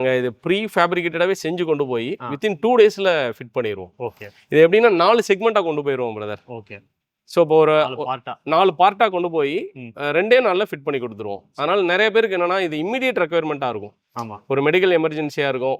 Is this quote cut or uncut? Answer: uncut